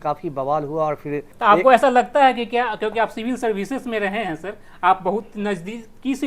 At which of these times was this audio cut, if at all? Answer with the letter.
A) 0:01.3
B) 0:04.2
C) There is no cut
A